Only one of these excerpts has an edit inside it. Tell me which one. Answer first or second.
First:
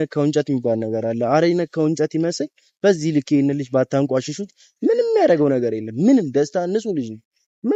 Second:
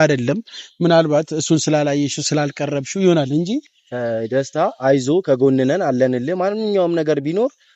second